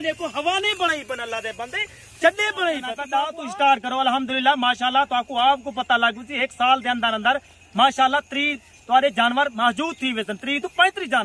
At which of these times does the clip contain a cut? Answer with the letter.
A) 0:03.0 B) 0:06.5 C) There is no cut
A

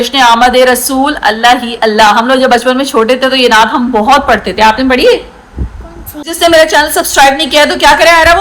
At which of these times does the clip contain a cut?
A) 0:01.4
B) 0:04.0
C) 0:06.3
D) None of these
C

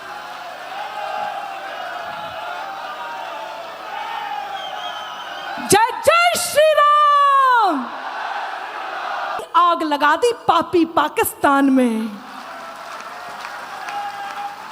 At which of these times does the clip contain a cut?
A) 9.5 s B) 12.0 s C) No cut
A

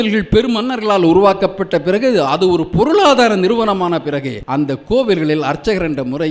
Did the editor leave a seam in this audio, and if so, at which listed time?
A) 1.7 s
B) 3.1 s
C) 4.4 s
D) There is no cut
C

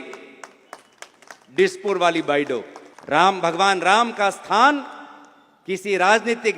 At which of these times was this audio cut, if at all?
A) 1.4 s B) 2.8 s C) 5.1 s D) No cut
B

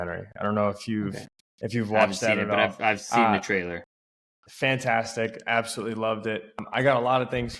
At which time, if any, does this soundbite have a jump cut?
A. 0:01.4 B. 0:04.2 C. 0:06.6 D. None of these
C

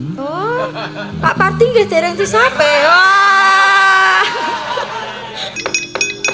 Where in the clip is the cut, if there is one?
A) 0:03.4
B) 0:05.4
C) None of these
B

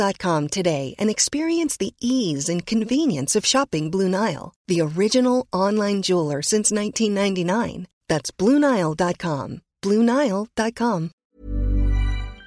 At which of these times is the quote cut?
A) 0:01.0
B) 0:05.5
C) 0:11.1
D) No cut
C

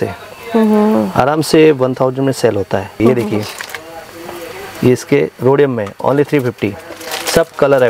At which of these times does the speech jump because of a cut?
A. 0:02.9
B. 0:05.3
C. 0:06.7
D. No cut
A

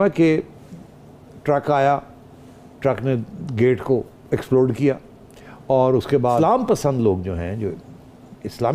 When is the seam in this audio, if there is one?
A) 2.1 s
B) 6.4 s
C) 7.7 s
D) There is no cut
B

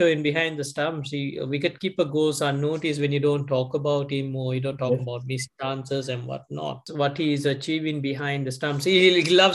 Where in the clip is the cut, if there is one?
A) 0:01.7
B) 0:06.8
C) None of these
B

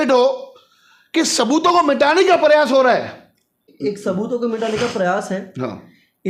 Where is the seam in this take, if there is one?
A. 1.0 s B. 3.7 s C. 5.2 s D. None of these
B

